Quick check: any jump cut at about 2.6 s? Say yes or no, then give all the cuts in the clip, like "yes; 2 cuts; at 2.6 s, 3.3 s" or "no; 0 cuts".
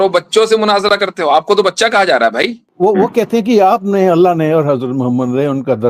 yes; 1 cut; at 2.6 s